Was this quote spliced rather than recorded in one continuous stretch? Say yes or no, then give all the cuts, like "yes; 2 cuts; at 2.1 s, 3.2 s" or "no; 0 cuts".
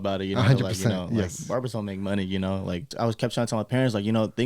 yes; 1 cut; at 2.9 s